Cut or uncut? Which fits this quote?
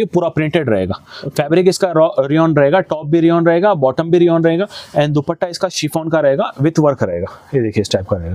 uncut